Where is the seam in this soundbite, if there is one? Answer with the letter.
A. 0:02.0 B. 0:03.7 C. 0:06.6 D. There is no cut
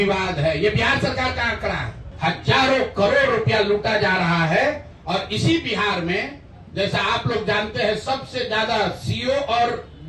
A